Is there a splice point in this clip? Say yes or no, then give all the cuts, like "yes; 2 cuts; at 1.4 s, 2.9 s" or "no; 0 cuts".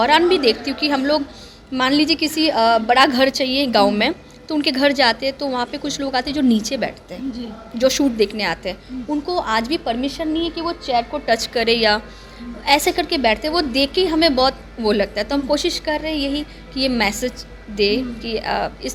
no; 0 cuts